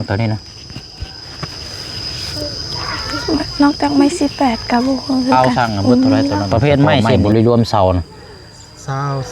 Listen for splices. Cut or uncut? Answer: cut